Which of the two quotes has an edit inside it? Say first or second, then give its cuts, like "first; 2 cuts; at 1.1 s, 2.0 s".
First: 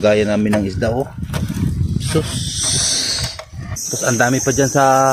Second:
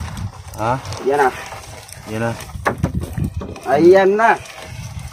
first; 1 cut; at 3.8 s